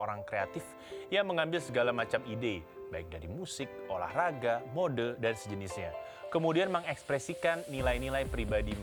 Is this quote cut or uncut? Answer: uncut